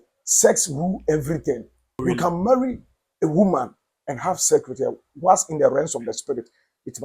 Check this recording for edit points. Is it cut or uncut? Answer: cut